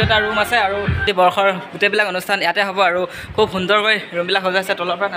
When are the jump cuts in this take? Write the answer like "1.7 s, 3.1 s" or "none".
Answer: 1.0 s